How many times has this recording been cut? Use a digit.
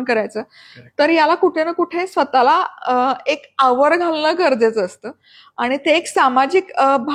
0